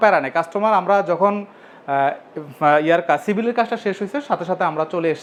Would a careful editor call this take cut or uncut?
uncut